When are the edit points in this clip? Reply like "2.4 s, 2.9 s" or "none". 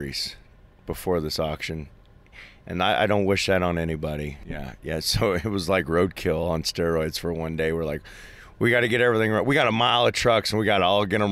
4.4 s